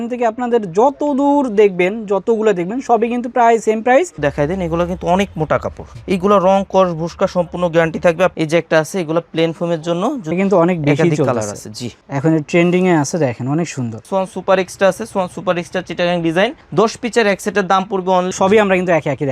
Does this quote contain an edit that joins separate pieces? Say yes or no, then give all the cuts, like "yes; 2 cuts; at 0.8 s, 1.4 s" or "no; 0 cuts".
yes; 5 cuts; at 4.2 s, 8.3 s, 10.3 s, 14.0 s, 18.3 s